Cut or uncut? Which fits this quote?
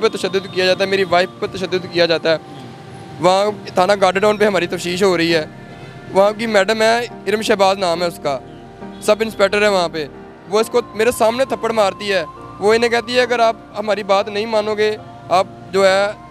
uncut